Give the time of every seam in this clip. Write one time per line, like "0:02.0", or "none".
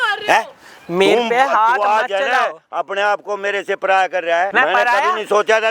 0:04.5